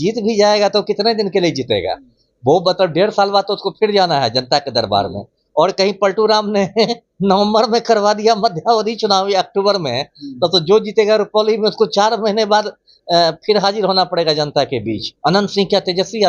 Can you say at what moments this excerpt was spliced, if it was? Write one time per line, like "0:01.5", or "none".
0:15.0